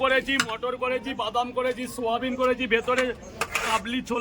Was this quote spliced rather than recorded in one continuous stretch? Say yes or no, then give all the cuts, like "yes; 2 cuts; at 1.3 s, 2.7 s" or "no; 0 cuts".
no; 0 cuts